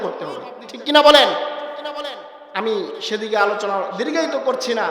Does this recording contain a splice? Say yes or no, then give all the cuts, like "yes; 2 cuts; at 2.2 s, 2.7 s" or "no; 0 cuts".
no; 0 cuts